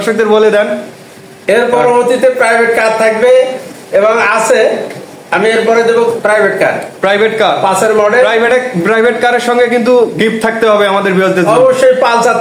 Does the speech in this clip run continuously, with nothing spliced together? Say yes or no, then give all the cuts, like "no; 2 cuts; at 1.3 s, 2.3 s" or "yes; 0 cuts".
yes; 0 cuts